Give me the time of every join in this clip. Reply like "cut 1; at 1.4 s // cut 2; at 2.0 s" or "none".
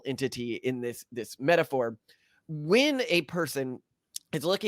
cut 1; at 2.1 s

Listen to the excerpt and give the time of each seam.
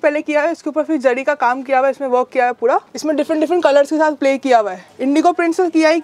cut 1; at 2.9 s // cut 2; at 4.9 s

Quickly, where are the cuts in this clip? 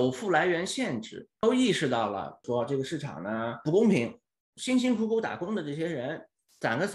cut 1; at 1.2 s // cut 2; at 2.3 s

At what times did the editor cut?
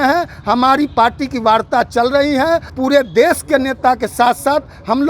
cut 1; at 2.7 s

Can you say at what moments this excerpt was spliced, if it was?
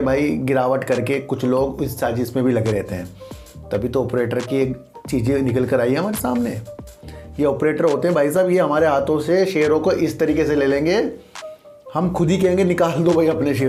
none

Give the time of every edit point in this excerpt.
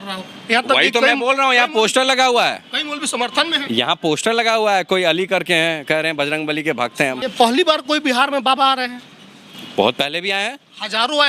cut 1; at 7.2 s

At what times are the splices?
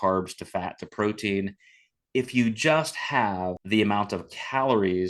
cut 1; at 3.6 s

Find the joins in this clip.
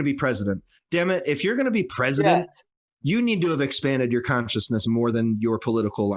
none

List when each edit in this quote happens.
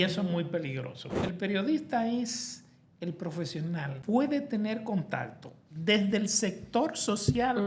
cut 1; at 1.2 s // cut 2; at 3.9 s

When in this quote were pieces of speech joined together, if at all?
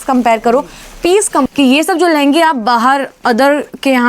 cut 1; at 1.5 s

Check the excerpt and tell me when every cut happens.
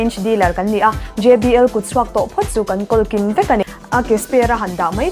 cut 1; at 3.8 s

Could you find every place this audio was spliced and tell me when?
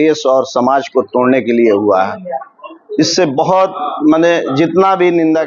none

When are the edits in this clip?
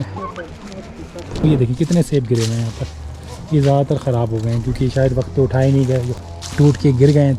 cut 1; at 1.4 s // cut 2; at 6.1 s

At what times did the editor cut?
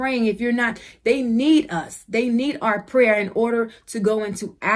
none

